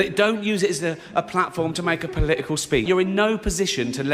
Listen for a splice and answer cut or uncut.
cut